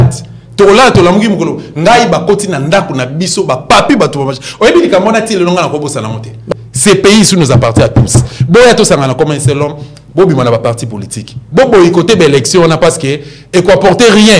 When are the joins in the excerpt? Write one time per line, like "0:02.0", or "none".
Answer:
0:06.5